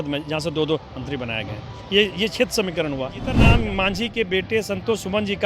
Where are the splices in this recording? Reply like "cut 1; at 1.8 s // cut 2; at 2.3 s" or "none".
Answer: cut 1; at 3.4 s